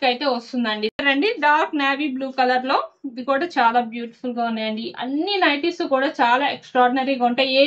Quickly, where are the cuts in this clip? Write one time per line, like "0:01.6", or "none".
0:01.0